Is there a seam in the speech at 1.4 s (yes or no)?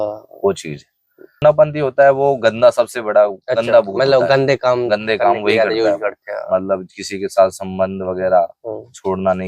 yes